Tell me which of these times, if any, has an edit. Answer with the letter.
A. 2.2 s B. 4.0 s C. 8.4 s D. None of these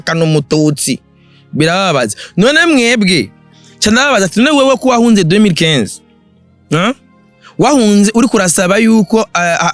D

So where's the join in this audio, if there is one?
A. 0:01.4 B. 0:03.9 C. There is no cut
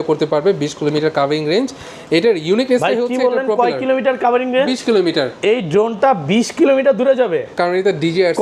C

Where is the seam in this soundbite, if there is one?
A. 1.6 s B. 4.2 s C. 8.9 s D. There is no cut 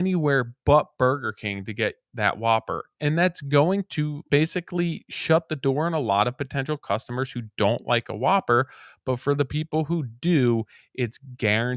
B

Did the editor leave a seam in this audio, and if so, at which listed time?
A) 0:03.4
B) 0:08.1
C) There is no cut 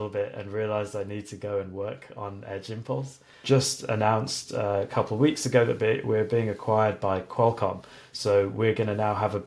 A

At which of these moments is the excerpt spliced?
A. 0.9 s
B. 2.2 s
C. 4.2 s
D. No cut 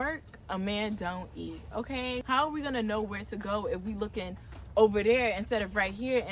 B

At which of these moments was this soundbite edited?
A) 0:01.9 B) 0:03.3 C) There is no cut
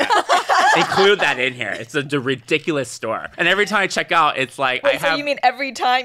B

